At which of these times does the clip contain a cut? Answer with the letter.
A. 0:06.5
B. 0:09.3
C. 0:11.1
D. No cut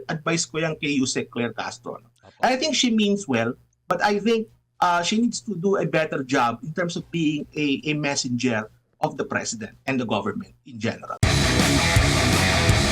C